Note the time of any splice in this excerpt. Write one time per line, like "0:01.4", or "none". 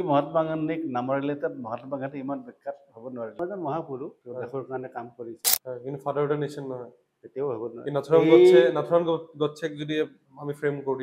0:03.4

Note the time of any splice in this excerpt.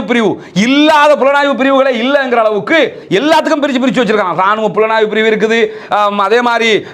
none

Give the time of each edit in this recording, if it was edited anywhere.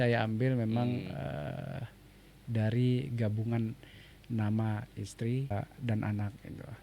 0:05.5

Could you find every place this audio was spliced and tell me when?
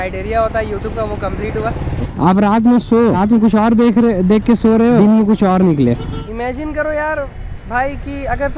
0:02.1
0:03.2
0:05.0
0:06.2

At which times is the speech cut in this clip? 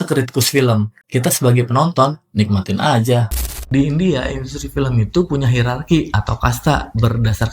0:03.5

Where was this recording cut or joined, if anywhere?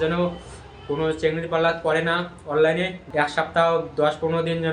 0:03.0

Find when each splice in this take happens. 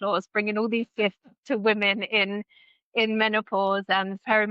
none

